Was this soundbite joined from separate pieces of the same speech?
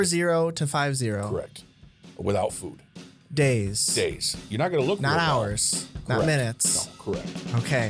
no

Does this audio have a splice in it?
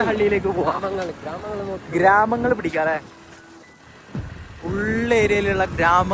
no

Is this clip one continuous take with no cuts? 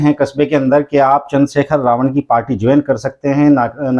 yes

